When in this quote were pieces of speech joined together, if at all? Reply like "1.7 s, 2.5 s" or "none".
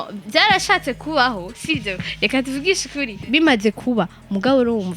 3.3 s